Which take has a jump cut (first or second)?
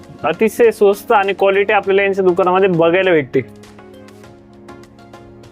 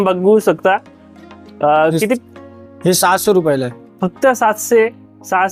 first